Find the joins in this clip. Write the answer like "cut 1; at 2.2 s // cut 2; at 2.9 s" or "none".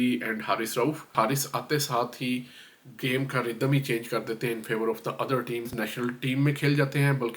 cut 1; at 1.1 s // cut 2; at 5.7 s